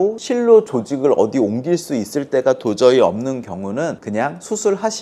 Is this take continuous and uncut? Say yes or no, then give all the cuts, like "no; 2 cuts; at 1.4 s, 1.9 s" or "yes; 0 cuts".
yes; 0 cuts